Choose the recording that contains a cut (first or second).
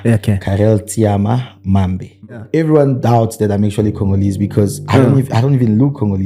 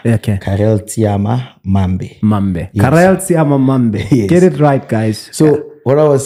first